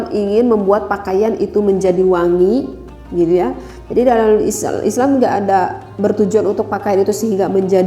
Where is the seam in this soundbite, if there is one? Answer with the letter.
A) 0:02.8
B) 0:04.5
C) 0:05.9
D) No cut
D